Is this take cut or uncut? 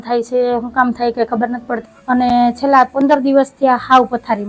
cut